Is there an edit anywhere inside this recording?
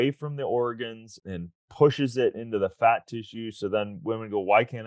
yes; 1 cut; at 1.1 s

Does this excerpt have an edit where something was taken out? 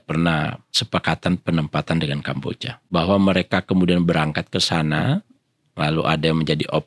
yes; 2 cuts; at 0.7 s, 2.7 s

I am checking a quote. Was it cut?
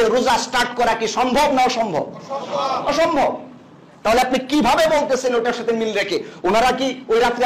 no; 0 cuts

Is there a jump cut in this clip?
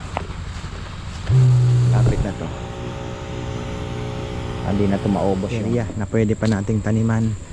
yes; 1 cut; at 5.6 s

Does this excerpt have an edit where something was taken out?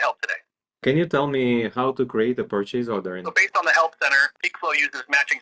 yes; 3 cuts; at 0.8 s, 3.3 s, 4.3 s

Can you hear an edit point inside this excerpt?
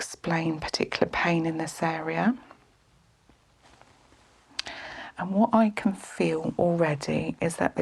yes; 1 cut; at 3.6 s

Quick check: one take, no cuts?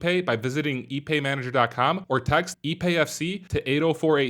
yes; 0 cuts

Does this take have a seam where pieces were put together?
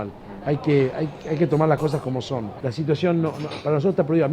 yes; 1 cut; at 2.5 s

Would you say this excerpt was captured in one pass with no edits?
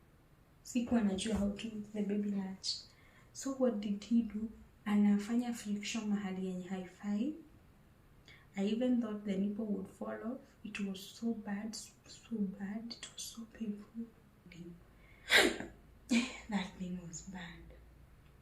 no; 1 cut; at 14.5 s

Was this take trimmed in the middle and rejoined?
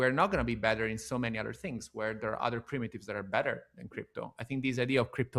no; 0 cuts

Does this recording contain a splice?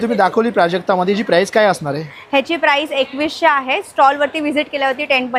no; 0 cuts

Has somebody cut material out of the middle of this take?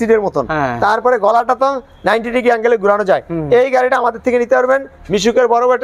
no; 0 cuts

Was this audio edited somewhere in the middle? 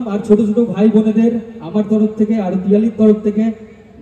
no; 0 cuts

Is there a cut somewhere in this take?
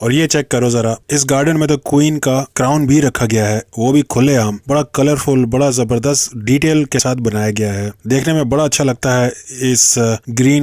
no; 0 cuts

